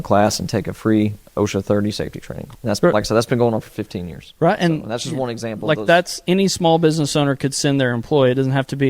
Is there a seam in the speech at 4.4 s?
no; 1 cut; at 2.4 s

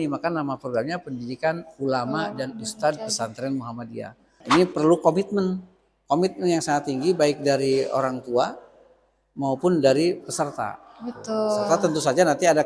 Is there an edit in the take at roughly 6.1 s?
no; 1 cut; at 4.5 s

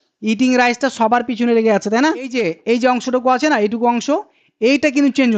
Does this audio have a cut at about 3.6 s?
no; 1 cut; at 2.3 s

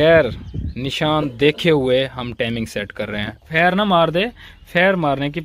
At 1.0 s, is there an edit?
no; 1 cut; at 3.4 s

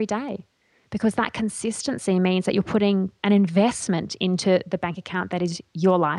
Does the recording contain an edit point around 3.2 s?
yes; 1 cut; at 3.2 s

